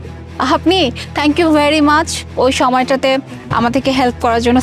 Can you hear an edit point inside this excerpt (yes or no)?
no